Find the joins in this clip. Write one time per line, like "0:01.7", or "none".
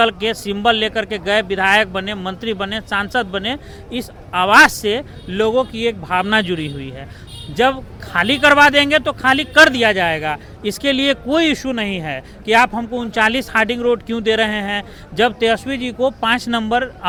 none